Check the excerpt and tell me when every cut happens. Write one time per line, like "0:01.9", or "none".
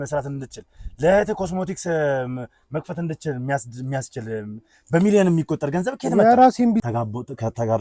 0:06.8

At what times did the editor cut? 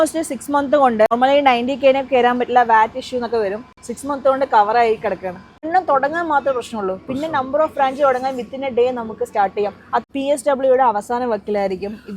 0:01.1
0:05.6
0:10.1

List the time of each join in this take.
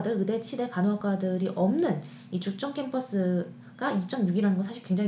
none

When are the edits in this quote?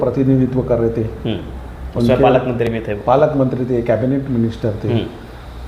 none

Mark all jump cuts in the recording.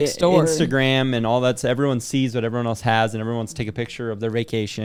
none

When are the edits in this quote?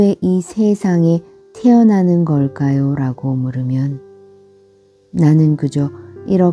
none

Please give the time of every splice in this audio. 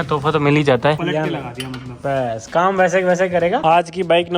0:01.0
0:03.6

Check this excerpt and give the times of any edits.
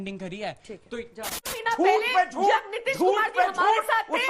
0:01.5

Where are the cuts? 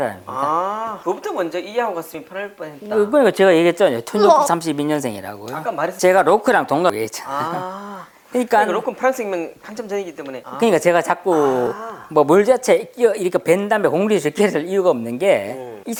none

